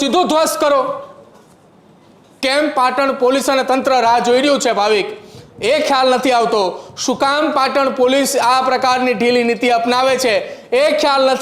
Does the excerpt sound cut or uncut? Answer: uncut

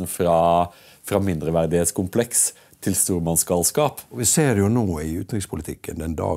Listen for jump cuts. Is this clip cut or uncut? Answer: cut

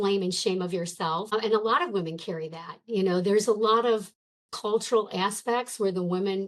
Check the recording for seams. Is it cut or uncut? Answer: cut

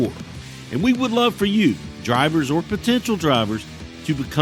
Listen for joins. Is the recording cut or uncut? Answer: uncut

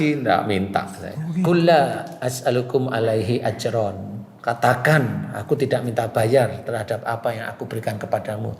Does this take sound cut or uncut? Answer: cut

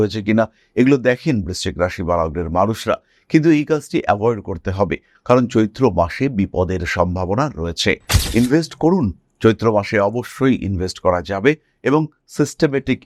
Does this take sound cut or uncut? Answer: uncut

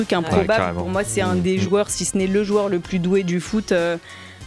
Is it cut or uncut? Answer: uncut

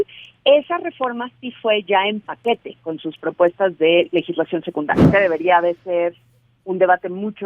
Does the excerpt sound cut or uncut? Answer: cut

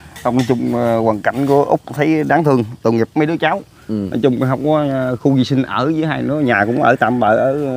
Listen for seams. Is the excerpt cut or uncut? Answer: uncut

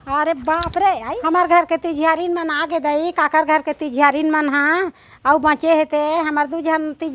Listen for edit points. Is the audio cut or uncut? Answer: cut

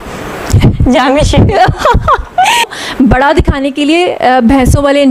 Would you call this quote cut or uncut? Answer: cut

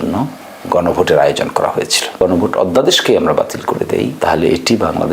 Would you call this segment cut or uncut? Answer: cut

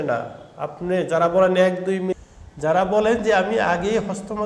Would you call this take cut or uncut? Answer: cut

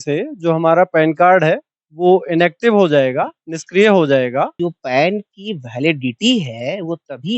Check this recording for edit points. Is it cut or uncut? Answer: cut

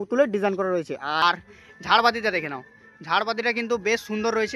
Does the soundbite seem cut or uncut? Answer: cut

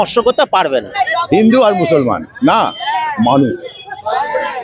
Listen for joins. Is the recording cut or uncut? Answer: cut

